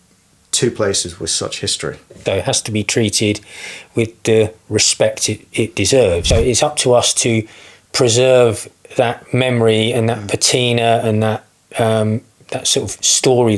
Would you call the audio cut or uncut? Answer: cut